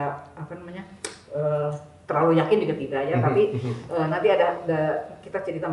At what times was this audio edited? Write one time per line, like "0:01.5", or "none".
none